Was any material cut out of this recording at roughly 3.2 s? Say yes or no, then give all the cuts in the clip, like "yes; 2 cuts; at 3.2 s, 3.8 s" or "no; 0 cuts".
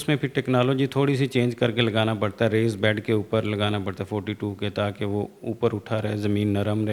no; 0 cuts